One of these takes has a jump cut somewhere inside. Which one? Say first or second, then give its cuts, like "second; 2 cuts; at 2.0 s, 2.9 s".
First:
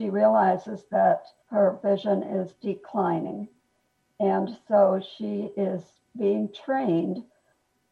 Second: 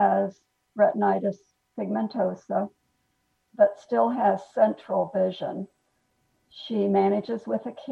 first; 1 cut; at 1.4 s